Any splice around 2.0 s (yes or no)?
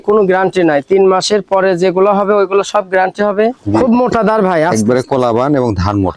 no